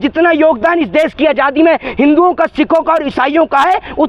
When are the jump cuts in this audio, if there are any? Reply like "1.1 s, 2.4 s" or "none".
none